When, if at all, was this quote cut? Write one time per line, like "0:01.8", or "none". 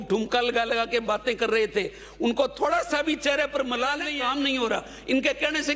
0:04.1